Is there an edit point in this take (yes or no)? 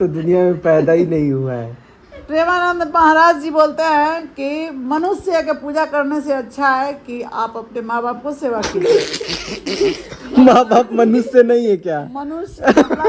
no